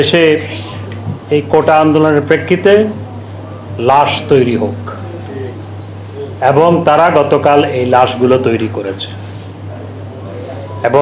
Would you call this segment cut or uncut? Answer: uncut